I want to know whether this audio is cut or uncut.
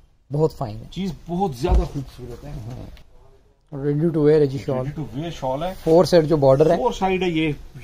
cut